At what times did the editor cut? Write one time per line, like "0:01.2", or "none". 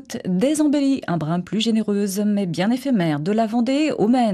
none